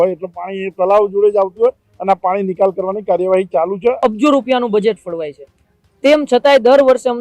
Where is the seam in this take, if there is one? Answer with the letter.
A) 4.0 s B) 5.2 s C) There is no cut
A